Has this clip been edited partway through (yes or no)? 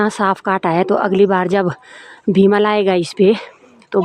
no